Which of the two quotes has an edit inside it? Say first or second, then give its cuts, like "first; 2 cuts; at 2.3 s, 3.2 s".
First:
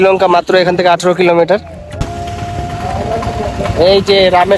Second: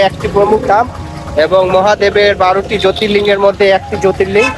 first; 1 cut; at 2.1 s